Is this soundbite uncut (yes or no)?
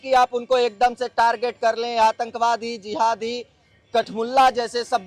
yes